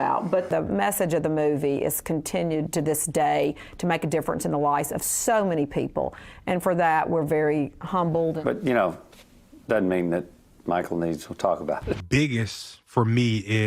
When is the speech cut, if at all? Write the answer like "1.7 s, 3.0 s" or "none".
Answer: 12.0 s